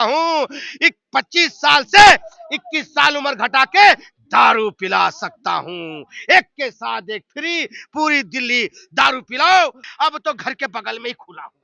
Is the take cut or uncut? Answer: cut